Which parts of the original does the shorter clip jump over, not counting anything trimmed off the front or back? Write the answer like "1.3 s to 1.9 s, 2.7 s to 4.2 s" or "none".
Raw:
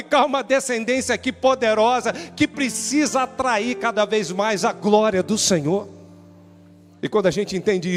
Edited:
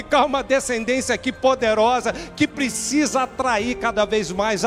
none